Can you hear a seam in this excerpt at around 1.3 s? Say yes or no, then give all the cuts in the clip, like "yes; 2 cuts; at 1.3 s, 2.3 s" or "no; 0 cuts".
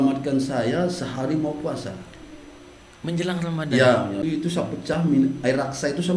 no; 1 cut; at 4.2 s